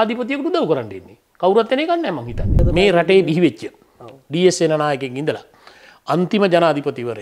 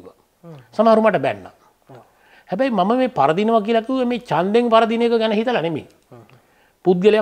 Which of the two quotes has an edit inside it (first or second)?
first